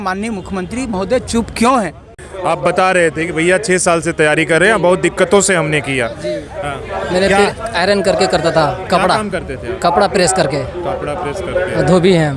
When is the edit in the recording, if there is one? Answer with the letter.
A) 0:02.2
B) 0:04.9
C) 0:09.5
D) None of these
A